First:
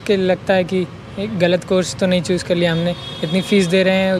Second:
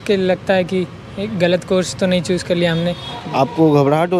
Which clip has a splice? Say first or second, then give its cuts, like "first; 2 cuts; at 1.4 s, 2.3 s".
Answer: second; 1 cut; at 3.1 s